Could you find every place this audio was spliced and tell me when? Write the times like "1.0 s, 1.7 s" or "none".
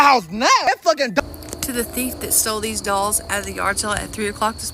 1.2 s